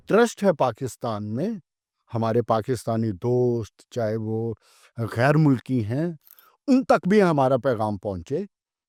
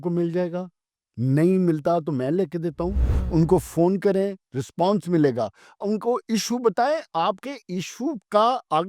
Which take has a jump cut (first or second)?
second